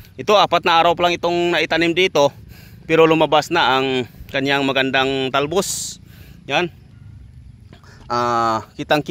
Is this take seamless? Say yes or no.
yes